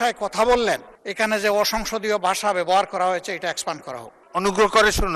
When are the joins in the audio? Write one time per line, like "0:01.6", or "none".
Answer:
0:01.0
0:04.2